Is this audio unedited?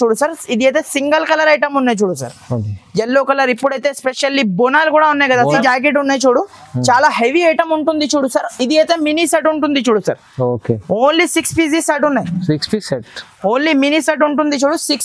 no; 1 cut; at 5.6 s

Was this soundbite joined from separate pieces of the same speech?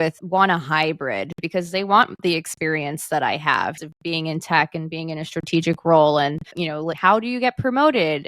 yes; 1 cut; at 3.8 s

